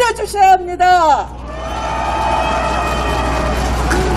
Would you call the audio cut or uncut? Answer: uncut